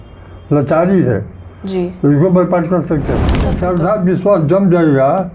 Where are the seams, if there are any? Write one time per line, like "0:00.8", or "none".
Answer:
0:03.5